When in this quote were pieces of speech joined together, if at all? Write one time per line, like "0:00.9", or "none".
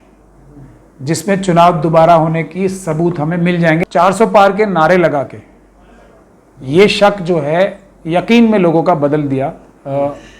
0:03.8